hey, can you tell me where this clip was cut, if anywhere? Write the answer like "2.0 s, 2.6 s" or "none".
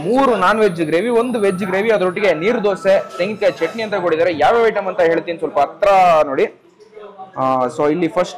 none

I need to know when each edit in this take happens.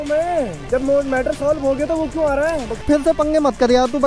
2.8 s

